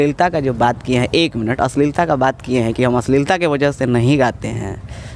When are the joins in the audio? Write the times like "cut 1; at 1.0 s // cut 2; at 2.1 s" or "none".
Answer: none